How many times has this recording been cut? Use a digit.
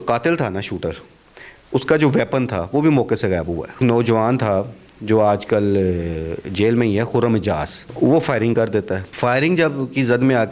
3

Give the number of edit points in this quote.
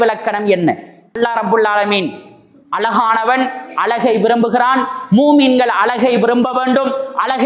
1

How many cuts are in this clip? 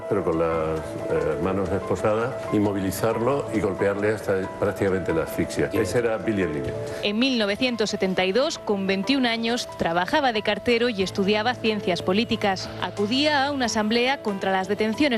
1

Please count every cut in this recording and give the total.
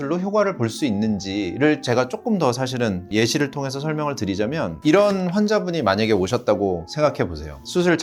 0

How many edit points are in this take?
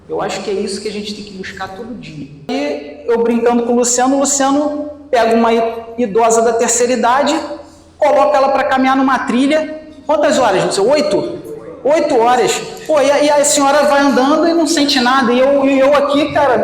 1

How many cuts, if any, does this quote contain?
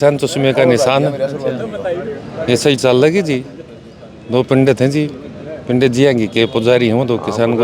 0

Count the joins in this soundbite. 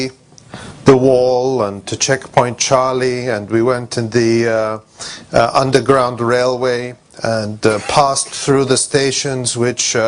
1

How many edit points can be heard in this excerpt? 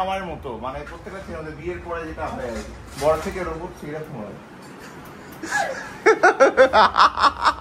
0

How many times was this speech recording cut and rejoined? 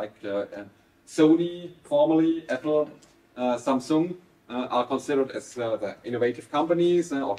0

